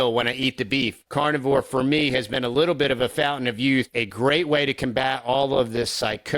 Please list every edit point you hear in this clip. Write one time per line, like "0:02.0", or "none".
0:01.0
0:03.9